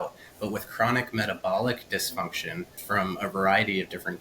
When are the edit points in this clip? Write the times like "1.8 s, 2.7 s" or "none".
2.8 s